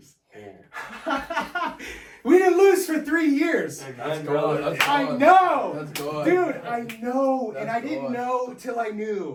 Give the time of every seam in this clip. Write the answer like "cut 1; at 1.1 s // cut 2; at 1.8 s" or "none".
none